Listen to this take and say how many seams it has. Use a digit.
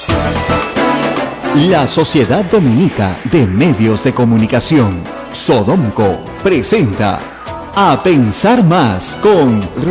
1